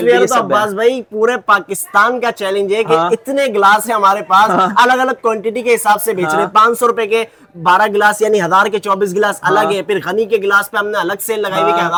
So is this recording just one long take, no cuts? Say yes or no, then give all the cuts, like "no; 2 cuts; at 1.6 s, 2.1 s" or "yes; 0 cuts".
yes; 0 cuts